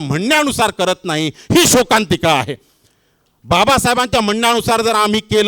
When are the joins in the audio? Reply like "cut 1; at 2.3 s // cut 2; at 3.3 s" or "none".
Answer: none